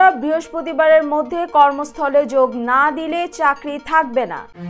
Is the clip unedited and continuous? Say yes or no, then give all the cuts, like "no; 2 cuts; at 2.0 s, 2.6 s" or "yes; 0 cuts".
yes; 0 cuts